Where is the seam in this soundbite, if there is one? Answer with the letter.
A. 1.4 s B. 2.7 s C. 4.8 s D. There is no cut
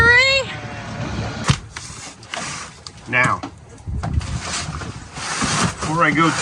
A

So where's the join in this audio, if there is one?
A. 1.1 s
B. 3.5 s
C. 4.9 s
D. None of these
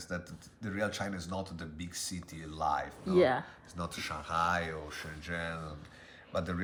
D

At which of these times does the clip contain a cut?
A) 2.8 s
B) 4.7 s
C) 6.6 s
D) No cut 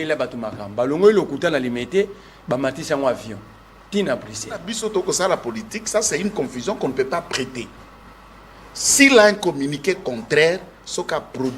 B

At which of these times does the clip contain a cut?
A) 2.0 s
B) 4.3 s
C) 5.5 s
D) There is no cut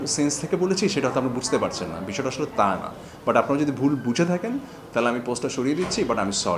D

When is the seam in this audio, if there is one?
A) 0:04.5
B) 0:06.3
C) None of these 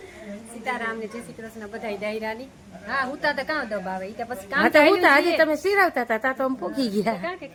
C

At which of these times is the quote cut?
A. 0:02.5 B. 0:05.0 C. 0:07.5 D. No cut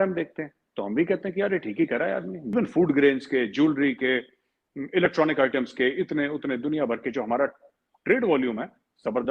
A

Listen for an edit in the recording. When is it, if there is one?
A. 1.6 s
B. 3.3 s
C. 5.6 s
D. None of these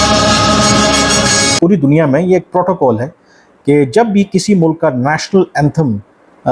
A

